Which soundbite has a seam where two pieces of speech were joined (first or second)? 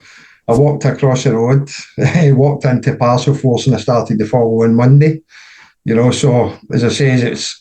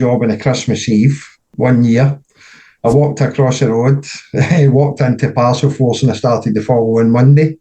second